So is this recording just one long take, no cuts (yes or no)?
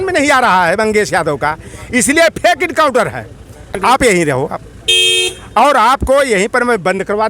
no